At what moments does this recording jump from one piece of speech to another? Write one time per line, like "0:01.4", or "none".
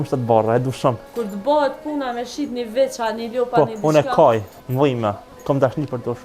0:01.1
0:04.9